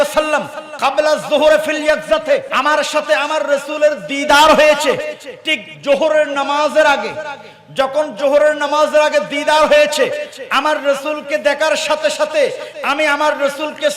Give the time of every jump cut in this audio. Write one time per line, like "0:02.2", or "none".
0:02.5